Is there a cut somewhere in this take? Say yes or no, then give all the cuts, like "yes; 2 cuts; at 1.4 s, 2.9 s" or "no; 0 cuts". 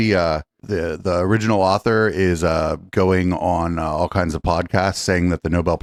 no; 0 cuts